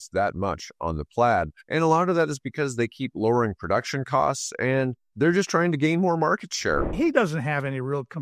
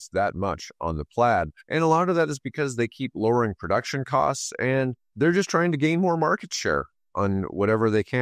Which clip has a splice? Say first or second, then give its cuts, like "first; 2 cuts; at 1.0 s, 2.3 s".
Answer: first; 1 cut; at 6.9 s